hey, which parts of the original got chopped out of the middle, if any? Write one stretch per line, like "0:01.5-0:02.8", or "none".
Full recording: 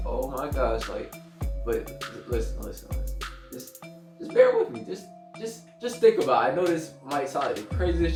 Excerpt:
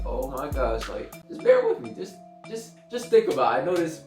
0:01.2-0:04.1